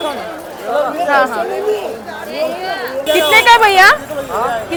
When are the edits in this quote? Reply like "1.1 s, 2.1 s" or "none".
none